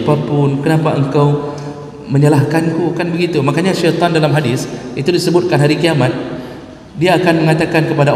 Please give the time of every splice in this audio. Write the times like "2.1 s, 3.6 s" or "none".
none